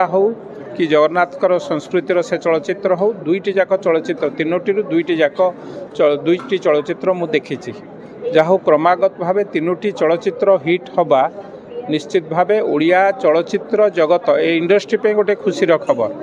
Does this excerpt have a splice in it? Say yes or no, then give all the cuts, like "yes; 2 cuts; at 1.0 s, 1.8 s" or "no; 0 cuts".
no; 0 cuts